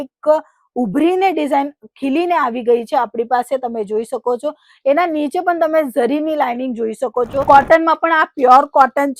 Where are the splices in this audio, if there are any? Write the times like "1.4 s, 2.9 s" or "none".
7.4 s